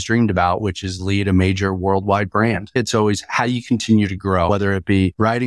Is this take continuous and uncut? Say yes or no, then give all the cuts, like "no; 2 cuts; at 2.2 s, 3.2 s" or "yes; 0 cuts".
no; 2 cuts; at 2.8 s, 4.5 s